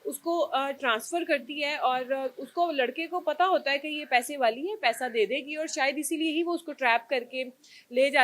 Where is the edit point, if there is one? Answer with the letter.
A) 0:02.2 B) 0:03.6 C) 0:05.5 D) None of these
D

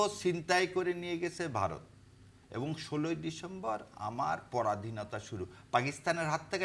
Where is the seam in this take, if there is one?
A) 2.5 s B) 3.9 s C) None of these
C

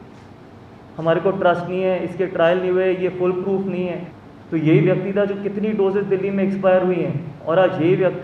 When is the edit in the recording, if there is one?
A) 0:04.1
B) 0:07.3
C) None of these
A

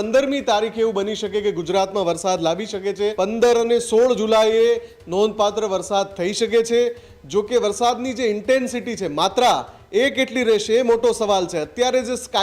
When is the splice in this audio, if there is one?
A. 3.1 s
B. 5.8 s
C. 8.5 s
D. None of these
A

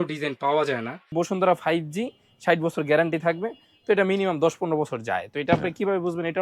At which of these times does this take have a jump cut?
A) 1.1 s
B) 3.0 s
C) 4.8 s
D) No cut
A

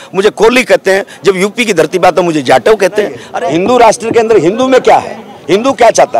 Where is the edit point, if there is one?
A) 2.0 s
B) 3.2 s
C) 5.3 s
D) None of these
B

